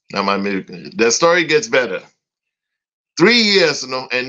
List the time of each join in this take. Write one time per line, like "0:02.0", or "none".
none